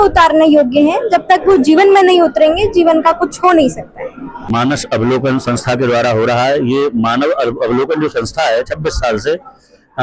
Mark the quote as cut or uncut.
cut